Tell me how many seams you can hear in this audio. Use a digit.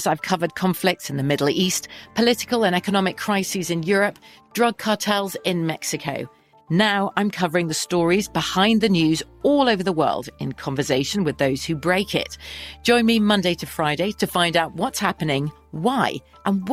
0